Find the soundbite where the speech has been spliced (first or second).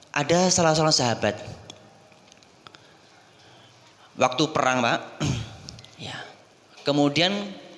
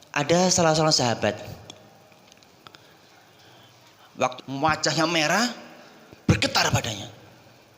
second